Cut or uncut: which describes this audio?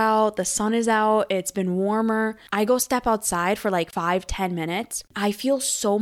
cut